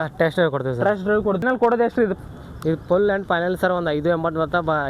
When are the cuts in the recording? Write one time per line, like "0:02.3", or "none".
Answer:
0:01.4